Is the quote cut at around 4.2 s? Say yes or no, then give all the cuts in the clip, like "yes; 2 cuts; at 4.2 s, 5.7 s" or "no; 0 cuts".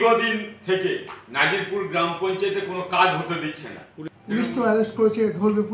yes; 1 cut; at 4.2 s